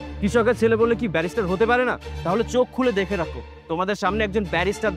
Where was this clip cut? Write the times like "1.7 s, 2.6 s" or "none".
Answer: 2.1 s